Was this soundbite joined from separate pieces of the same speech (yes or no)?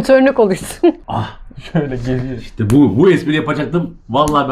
yes